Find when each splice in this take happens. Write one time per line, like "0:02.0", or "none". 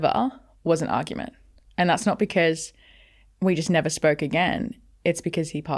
none